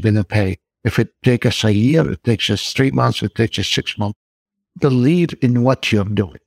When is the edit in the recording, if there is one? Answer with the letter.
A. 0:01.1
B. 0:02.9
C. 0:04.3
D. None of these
C